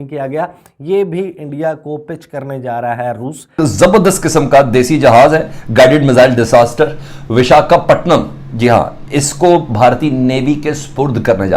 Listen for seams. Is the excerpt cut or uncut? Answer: cut